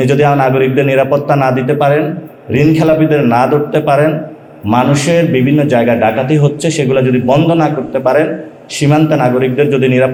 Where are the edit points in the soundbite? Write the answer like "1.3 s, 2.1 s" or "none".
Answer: none